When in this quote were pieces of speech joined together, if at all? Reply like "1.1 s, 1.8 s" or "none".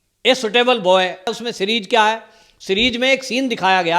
1.3 s